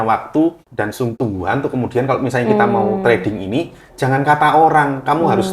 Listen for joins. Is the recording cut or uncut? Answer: cut